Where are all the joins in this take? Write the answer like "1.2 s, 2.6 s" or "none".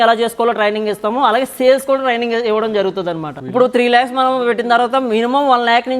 3.3 s